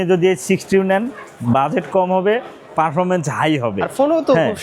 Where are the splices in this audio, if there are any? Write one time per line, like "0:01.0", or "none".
none